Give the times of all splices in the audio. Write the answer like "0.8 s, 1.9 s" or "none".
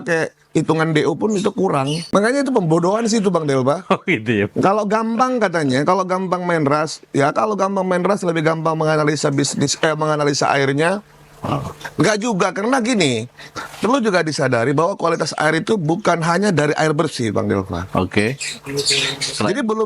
2.0 s

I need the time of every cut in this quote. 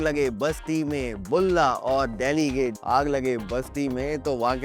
2.8 s

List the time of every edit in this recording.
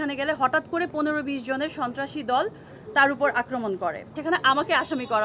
4.1 s

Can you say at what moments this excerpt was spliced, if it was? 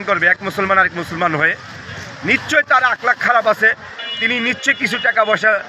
none

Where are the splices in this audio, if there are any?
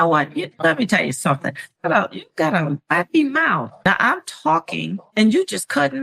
3.7 s

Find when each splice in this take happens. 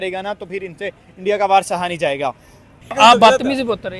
2.9 s

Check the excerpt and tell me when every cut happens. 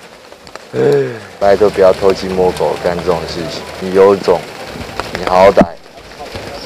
1.2 s, 3.7 s

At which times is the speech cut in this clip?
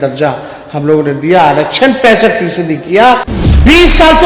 3.3 s

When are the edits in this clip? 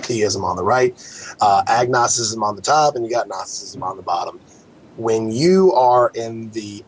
5.6 s

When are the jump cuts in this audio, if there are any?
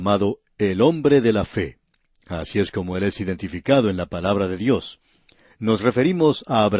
1.1 s

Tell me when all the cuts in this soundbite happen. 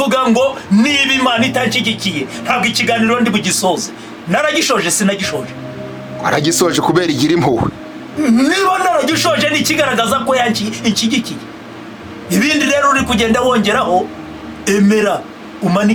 none

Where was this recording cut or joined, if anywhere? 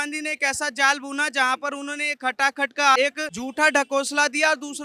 3.0 s

